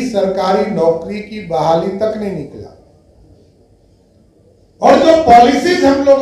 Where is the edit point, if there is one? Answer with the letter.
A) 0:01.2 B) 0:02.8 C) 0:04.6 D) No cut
D